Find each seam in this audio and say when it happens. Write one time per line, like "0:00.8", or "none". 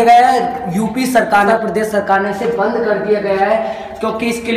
0:01.5